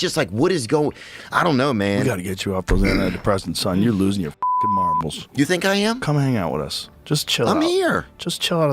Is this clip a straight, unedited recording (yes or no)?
no